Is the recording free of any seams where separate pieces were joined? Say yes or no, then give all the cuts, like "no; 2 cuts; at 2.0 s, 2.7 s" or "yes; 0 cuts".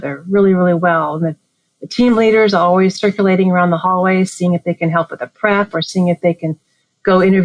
yes; 0 cuts